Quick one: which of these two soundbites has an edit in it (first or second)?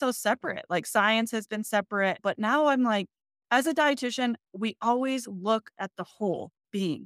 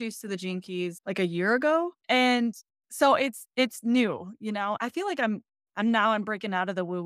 second